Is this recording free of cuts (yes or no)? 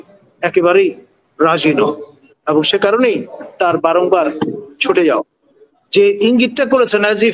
no